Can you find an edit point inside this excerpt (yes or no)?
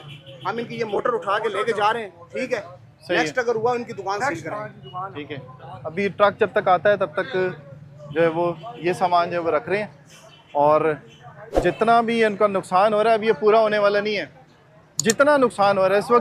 no